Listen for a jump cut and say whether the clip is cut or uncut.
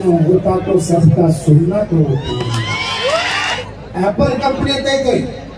cut